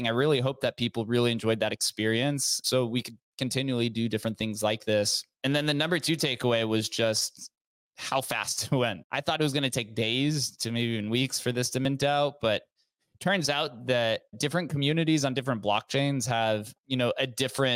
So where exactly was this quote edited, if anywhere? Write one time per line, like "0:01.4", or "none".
0:02.6
0:05.3
0:09.0
0:14.3
0:16.7